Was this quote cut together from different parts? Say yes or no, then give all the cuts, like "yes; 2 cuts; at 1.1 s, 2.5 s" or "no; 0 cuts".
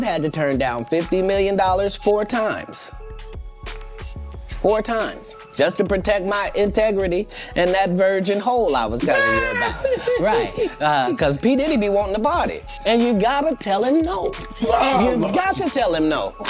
no; 0 cuts